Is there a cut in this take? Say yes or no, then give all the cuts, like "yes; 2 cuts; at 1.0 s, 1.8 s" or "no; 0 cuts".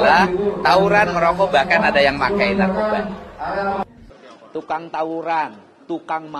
yes; 1 cut; at 4.0 s